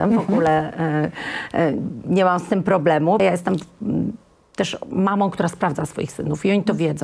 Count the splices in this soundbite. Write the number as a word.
one